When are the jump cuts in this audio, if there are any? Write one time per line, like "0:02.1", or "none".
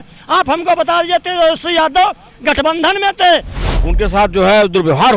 0:03.6